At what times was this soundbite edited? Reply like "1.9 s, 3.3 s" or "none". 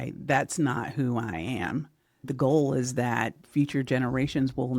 2.3 s, 3.4 s